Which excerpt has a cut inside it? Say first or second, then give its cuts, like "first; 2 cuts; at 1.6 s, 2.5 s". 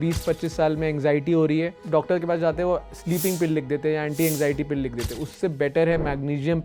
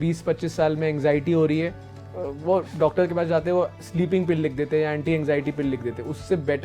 first; 1 cut; at 1.8 s